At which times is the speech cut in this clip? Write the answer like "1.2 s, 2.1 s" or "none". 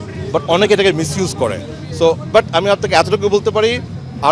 none